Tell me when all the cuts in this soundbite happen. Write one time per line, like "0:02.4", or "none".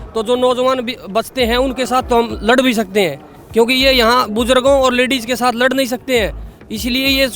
none